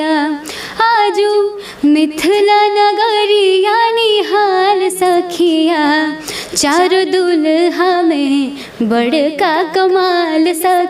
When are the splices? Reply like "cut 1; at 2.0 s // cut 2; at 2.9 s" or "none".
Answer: none